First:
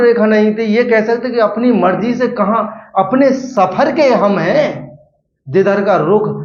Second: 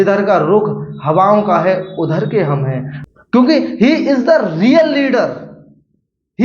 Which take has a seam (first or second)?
second